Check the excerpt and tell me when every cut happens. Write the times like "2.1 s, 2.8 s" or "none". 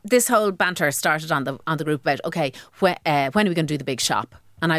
none